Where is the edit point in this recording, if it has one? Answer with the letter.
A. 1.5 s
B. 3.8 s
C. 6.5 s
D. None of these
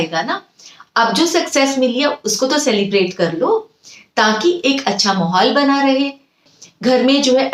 C